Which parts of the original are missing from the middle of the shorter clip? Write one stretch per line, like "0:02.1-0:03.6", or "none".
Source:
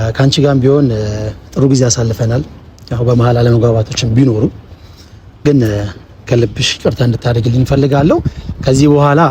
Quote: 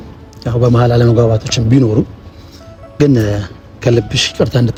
none

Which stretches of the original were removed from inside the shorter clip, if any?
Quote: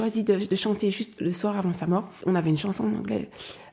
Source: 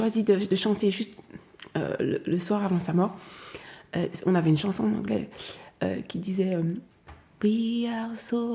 0:01.2-0:02.2
0:03.2-0:04.2

